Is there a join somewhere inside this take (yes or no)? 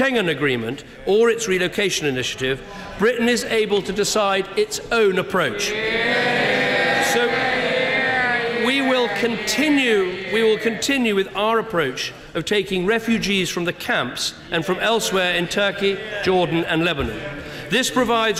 no